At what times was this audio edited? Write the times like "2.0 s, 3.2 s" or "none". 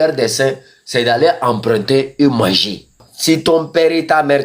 3.1 s